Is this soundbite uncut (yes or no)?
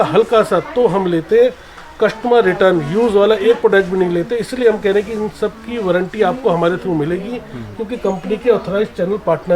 yes